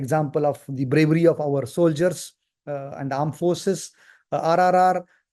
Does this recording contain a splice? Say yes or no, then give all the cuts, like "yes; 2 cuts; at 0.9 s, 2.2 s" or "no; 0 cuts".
no; 0 cuts